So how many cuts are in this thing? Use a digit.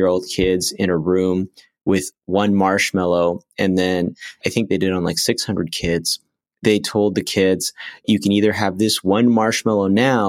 2